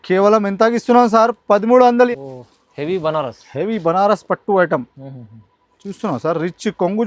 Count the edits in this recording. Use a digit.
1